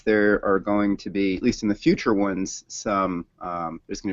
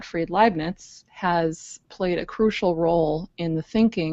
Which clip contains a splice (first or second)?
first